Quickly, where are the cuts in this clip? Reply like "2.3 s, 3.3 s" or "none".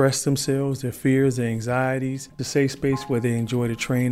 2.4 s